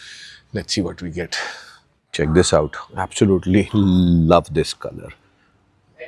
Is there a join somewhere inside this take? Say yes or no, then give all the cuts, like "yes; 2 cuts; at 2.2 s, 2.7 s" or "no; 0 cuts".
no; 0 cuts